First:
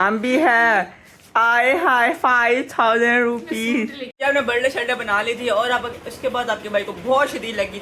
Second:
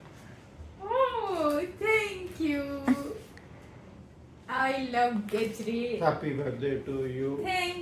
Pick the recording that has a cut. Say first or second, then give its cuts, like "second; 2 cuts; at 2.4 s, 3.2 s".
first; 1 cut; at 4.1 s